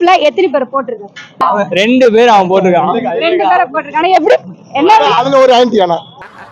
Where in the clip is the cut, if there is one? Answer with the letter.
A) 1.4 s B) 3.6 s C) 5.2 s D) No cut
A